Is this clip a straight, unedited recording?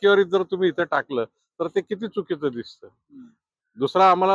yes; 0 cuts

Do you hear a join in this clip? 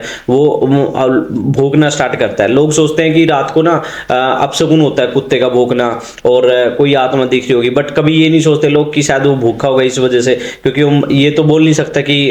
no; 0 cuts

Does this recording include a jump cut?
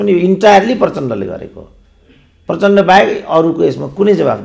no; 0 cuts

